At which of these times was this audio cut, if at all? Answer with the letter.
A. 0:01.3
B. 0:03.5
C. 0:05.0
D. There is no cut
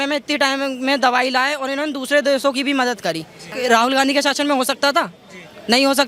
B